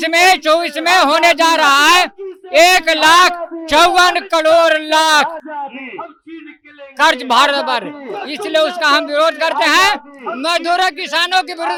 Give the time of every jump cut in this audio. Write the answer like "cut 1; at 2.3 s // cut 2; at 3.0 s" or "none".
none